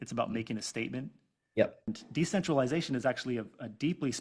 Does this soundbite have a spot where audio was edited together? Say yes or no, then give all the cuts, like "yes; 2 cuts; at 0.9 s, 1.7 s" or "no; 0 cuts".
yes; 1 cut; at 1.9 s